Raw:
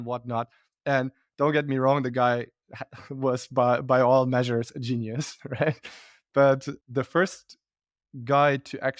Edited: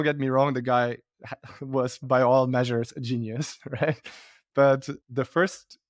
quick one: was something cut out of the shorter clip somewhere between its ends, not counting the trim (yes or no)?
yes